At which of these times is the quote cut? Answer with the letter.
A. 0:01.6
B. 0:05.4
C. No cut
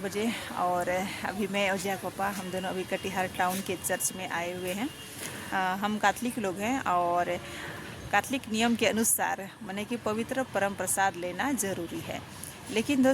B